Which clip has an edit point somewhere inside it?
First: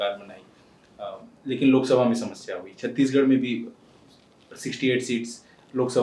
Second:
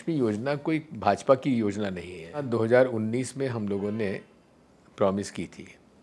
second; 1 cut; at 2.4 s

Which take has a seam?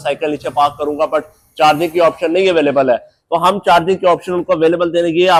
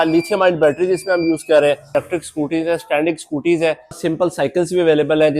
second; 2 cuts; at 1.9 s, 4.0 s

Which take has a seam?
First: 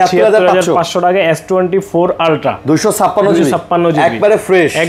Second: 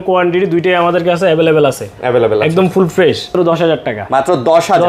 second; 1 cut; at 3.3 s

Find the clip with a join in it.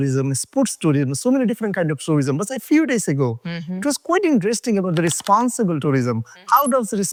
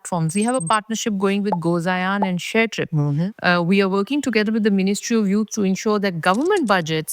second; 1 cut; at 3.3 s

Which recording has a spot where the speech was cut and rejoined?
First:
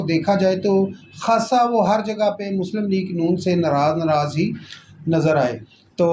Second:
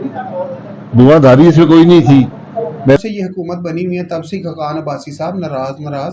second; 1 cut; at 3.0 s

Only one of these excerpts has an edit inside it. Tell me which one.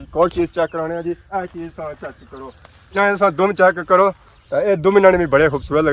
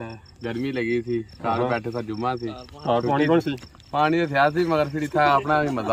first; 2 cuts; at 1.2 s, 2.9 s

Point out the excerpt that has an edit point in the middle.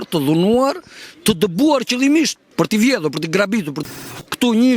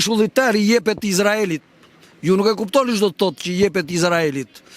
first; 2 cuts; at 2.4 s, 3.8 s

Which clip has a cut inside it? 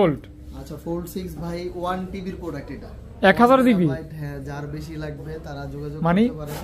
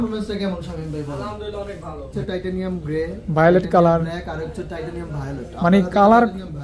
second; 1 cut; at 2.1 s

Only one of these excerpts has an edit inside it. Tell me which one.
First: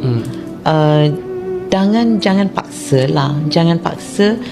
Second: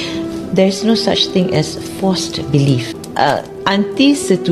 second; 1 cut; at 3.0 s

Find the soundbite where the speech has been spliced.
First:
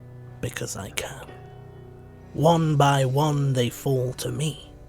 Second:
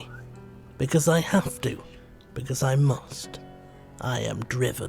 first; 1 cut; at 1.9 s

